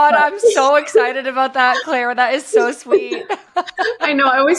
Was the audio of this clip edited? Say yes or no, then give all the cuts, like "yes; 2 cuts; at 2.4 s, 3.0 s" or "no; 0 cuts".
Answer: no; 0 cuts